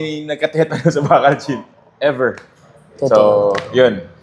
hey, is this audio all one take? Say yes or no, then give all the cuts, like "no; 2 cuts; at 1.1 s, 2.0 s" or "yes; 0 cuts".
yes; 0 cuts